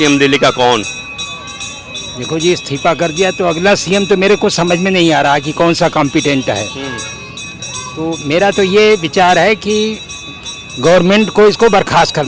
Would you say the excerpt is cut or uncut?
uncut